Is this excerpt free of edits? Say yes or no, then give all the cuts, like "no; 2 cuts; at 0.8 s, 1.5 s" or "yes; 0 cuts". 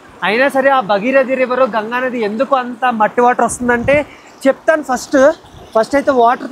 yes; 0 cuts